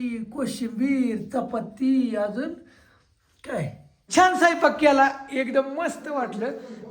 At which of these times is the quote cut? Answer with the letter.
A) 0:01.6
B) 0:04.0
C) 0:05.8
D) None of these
B